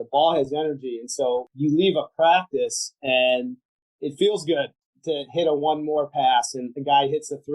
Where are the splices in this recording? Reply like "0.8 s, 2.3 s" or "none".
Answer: 1.5 s